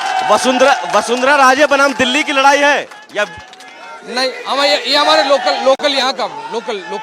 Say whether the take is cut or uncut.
uncut